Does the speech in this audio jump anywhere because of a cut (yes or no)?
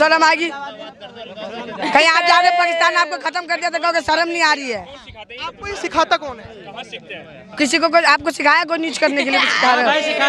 no